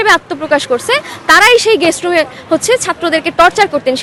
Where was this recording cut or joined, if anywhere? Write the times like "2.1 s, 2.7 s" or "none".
none

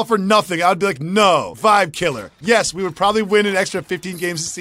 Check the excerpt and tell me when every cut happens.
1.5 s

